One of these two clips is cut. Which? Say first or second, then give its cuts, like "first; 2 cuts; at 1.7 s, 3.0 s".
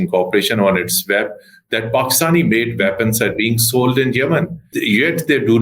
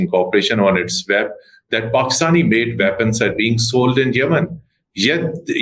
first; 1 cut; at 4.6 s